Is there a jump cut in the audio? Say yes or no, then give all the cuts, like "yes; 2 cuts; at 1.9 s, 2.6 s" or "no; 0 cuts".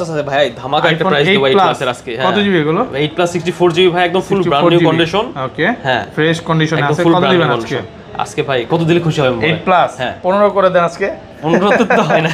no; 0 cuts